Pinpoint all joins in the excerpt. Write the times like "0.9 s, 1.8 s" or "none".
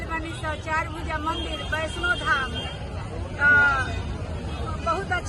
none